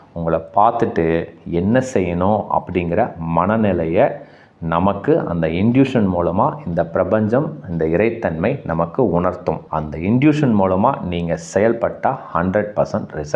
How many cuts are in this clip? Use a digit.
1